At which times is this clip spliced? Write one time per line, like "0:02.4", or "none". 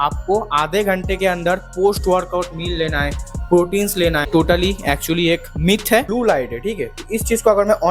0:04.3
0:06.1